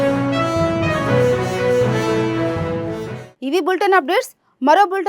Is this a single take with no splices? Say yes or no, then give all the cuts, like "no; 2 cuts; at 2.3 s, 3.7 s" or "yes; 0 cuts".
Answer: yes; 0 cuts